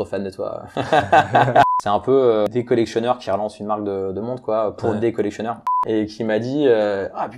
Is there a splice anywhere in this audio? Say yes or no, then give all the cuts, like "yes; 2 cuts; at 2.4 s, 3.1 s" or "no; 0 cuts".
yes; 3 cuts; at 1.7 s, 2.5 s, 5.8 s